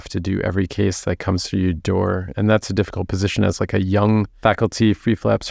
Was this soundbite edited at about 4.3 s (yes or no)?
yes